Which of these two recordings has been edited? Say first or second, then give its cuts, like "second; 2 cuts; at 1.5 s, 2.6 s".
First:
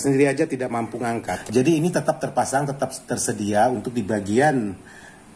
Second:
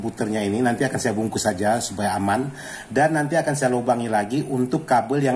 first; 1 cut; at 1.3 s